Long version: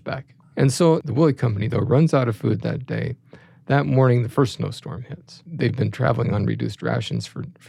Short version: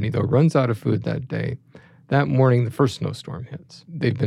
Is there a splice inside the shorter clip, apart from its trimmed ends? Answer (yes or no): no